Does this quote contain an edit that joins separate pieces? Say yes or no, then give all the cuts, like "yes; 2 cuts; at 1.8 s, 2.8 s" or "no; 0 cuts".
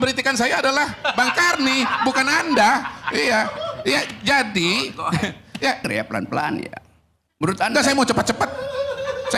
yes; 1 cut; at 5.9 s